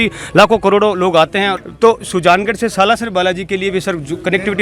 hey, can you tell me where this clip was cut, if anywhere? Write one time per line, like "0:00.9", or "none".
0:01.6